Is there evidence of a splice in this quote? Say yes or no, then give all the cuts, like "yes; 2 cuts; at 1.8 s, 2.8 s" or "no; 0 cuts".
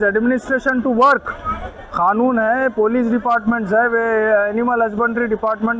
no; 0 cuts